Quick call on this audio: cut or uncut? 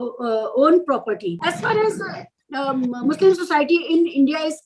cut